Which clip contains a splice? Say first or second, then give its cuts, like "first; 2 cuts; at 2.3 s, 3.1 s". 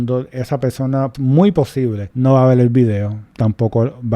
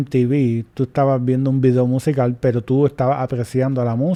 first; 3 cuts; at 1.1 s, 2.0 s, 3.2 s